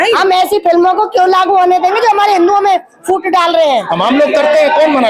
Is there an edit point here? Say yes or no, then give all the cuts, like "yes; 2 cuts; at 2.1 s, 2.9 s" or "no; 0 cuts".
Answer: yes; 1 cut; at 3.9 s